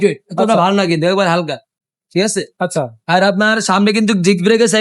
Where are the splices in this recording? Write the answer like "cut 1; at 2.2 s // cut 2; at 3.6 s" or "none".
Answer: none